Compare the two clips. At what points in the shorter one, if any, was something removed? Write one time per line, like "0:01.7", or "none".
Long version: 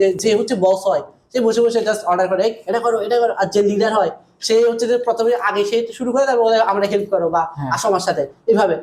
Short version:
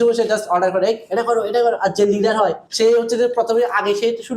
0:02.6